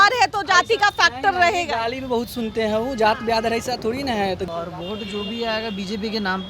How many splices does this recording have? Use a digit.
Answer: 1